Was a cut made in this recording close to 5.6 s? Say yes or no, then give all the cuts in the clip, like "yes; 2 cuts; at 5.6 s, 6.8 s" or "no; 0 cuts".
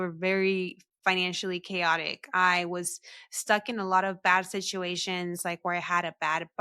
no; 0 cuts